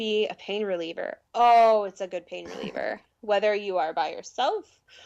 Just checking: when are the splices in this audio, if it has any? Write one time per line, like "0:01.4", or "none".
none